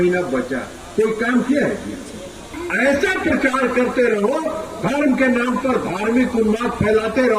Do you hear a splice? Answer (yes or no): yes